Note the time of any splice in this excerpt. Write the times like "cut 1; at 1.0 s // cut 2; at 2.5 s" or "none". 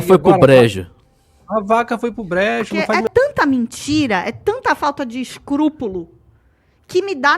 cut 1; at 3.0 s